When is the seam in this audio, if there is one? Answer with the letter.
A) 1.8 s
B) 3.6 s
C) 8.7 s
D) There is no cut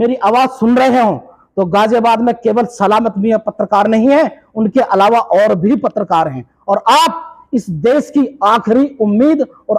D